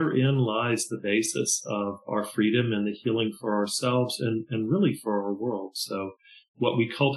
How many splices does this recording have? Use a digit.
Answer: 1